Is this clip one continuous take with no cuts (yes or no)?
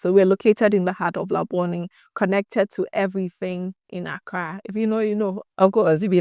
yes